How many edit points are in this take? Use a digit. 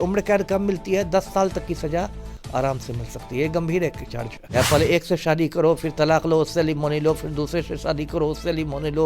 1